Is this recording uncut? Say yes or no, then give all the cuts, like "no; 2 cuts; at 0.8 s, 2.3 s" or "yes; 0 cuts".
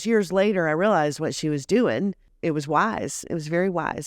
no; 1 cut; at 2.3 s